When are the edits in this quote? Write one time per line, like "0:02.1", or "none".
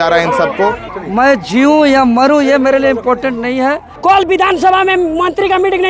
0:00.9
0:03.9